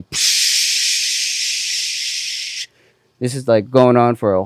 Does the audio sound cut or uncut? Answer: uncut